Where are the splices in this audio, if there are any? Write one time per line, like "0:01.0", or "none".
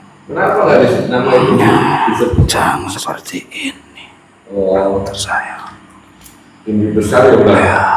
0:03.0